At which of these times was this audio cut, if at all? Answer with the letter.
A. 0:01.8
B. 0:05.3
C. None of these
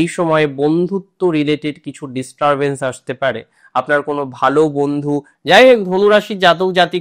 B